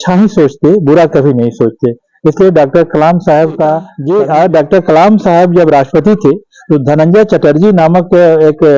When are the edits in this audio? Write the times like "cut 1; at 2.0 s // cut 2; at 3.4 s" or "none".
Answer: cut 1; at 3.9 s